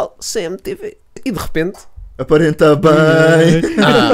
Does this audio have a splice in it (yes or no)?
yes